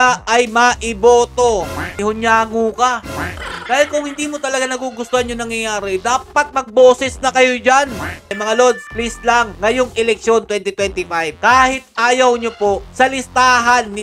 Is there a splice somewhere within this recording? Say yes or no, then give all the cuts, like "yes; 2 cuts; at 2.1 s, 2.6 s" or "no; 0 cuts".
yes; 2 cuts; at 2.0 s, 8.3 s